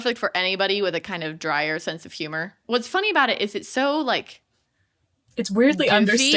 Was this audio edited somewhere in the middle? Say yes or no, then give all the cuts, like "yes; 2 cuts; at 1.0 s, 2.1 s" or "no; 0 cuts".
yes; 1 cut; at 2.6 s